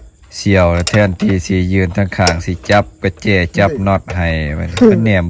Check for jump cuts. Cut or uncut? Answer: uncut